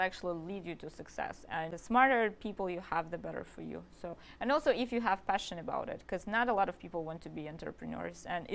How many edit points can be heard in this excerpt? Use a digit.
2